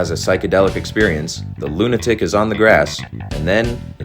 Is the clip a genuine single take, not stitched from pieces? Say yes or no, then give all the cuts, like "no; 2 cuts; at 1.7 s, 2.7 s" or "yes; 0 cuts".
yes; 0 cuts